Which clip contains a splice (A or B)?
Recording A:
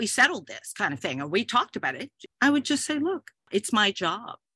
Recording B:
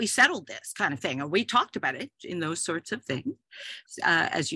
A